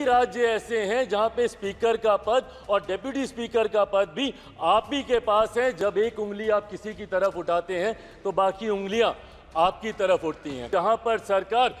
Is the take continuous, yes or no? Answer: no